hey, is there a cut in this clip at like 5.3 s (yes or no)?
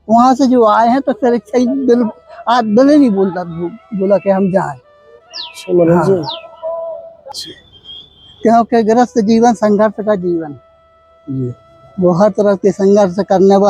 no